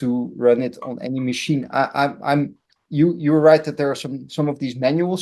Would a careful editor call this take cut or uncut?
uncut